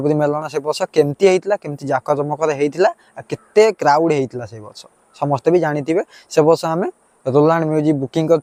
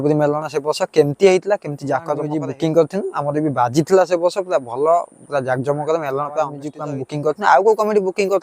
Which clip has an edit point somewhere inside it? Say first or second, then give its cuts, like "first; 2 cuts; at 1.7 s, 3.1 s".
second; 2 cuts; at 2.3 s, 6.7 s